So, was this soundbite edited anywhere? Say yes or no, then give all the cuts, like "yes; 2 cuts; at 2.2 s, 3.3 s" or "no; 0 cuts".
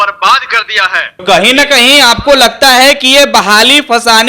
yes; 1 cut; at 1.2 s